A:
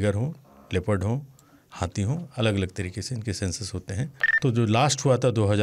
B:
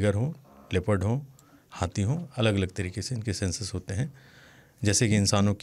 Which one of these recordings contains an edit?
A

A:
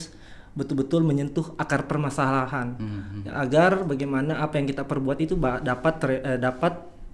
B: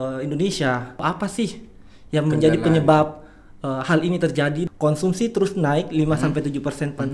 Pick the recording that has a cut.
B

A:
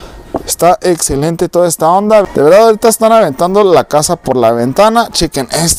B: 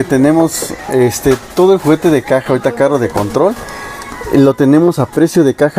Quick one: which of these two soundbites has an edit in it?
A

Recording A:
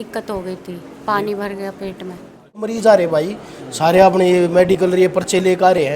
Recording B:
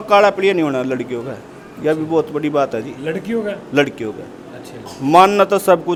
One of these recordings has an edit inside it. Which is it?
A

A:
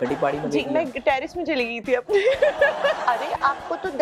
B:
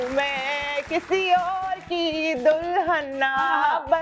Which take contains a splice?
A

